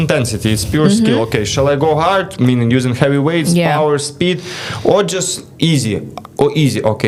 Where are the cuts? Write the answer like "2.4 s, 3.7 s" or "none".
none